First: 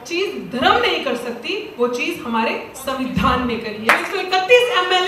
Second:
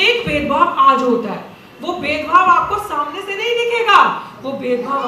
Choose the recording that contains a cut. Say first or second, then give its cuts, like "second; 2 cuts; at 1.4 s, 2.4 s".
first; 1 cut; at 4.0 s